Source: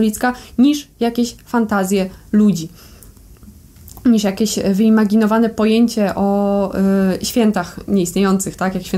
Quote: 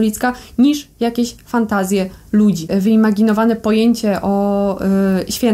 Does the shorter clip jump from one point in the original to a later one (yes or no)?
yes